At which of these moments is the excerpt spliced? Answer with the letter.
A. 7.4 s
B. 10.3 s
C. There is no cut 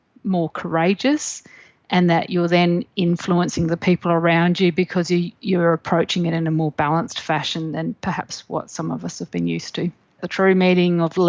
B